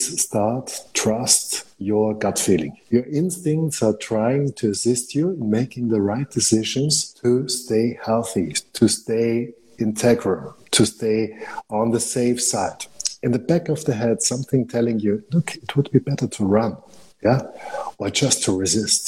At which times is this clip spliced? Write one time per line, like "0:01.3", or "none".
0:02.8
0:07.0
0:13.1